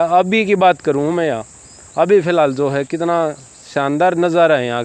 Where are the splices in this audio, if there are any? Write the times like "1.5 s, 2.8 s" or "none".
none